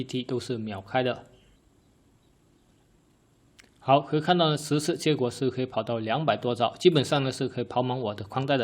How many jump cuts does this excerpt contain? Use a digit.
1